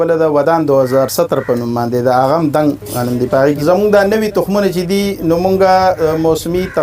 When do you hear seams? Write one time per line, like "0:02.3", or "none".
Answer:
0:03.6